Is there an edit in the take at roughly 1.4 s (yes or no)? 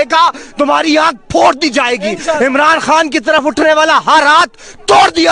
yes